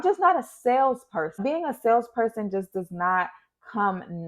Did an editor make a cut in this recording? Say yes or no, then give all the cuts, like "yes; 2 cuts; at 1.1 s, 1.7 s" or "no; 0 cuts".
yes; 1 cut; at 1.4 s